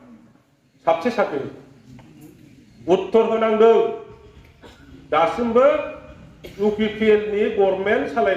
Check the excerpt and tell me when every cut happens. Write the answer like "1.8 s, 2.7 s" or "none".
none